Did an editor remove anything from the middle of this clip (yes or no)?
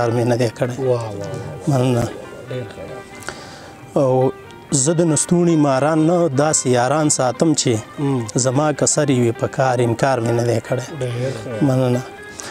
no